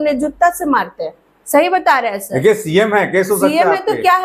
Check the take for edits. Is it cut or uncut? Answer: uncut